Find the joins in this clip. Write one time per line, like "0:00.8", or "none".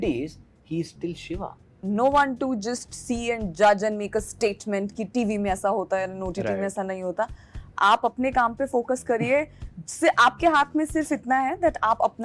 0:01.8

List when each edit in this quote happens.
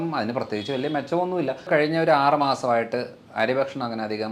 0:01.7

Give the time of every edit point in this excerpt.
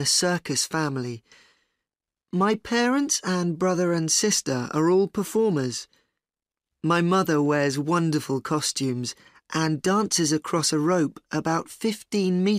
0:03.2

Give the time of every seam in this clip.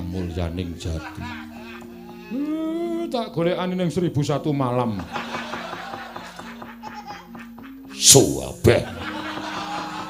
none

